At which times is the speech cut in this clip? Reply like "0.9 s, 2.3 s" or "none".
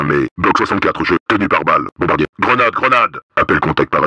1.2 s, 3.2 s